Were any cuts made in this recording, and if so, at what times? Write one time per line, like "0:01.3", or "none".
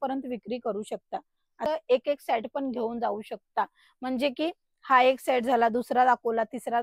0:01.6